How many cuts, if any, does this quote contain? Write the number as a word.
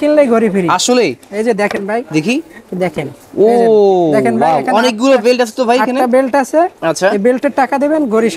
zero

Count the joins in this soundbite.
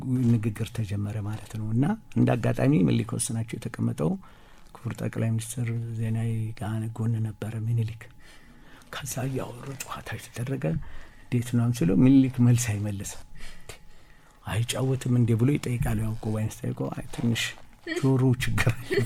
zero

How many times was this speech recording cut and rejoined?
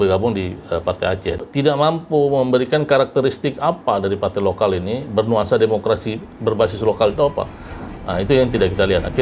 one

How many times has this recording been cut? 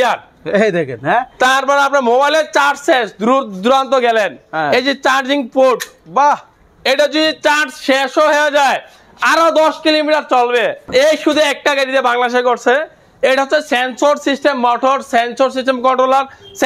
two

